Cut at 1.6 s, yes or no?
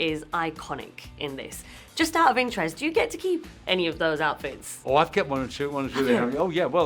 no